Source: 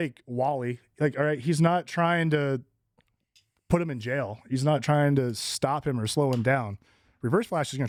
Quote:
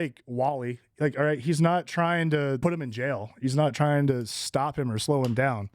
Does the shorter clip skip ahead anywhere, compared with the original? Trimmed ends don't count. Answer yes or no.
yes